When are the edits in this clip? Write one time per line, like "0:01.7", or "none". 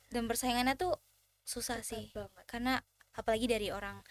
none